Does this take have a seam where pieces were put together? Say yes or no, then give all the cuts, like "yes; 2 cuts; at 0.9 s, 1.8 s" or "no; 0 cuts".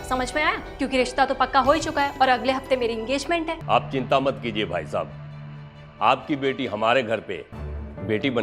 yes; 1 cut; at 3.6 s